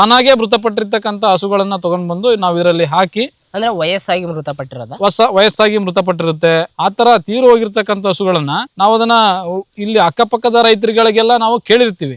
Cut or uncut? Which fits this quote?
uncut